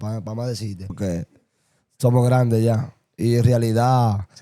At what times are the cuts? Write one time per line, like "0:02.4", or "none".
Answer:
0:00.9

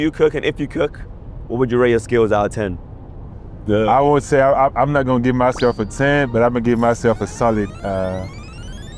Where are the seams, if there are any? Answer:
none

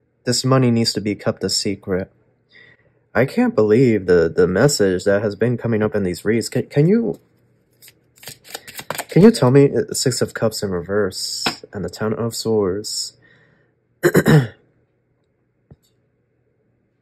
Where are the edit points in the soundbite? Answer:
none

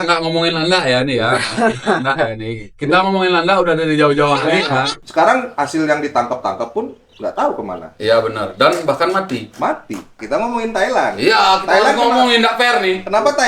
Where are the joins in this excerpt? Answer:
0:05.0
0:10.2

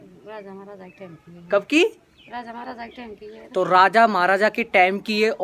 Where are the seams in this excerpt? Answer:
none

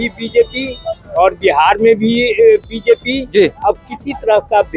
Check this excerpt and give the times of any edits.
none

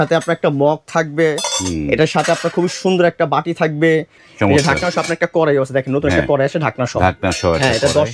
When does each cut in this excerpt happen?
0:04.2

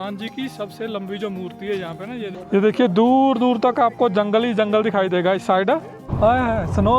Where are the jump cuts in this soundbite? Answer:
0:02.4
0:06.0

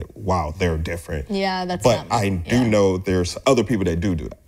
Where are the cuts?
0:03.3

